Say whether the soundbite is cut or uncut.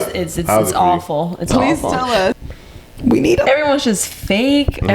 cut